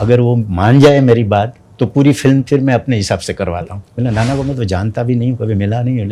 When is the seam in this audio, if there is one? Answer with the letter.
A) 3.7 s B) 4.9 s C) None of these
A